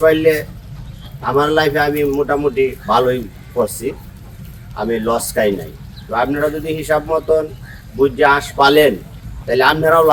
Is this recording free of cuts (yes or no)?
yes